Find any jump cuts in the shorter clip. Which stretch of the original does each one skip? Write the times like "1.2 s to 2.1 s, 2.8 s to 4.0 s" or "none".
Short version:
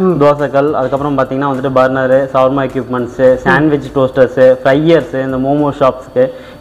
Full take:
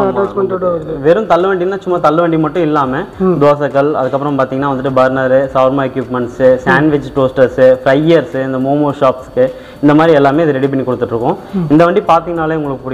none